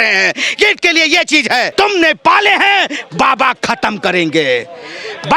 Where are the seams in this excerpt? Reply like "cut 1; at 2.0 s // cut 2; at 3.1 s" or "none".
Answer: cut 1; at 1.7 s